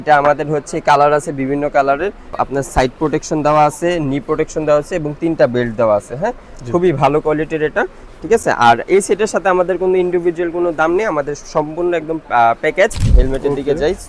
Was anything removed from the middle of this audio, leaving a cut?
yes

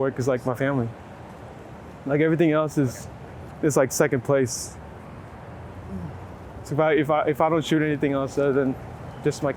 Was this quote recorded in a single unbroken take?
yes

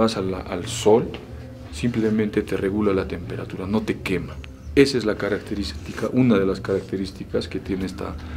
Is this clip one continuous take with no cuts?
yes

